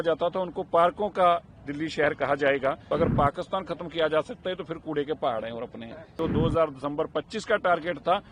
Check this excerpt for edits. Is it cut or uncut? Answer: cut